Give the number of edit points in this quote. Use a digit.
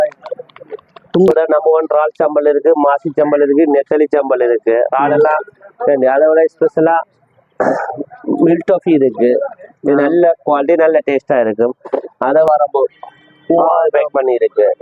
2